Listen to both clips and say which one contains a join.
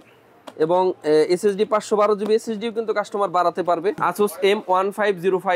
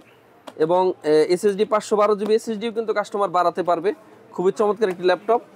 first; 1 cut; at 4.0 s

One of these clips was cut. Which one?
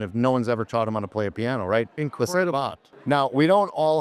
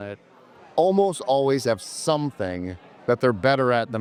first; 1 cut; at 2.9 s

